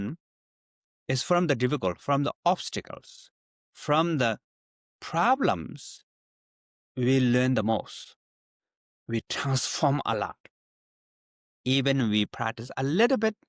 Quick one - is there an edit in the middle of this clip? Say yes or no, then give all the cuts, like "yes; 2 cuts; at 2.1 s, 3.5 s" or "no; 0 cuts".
no; 0 cuts